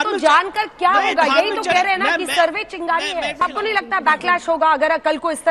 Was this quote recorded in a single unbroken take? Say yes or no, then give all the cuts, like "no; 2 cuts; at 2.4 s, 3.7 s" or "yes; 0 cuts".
no; 1 cut; at 3.4 s